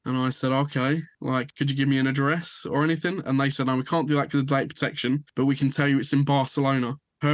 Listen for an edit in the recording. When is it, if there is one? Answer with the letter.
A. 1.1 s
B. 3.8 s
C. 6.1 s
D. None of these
D